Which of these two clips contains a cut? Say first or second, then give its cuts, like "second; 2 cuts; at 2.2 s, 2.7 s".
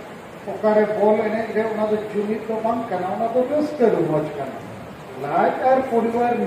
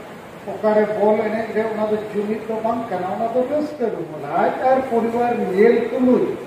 second; 1 cut; at 4.1 s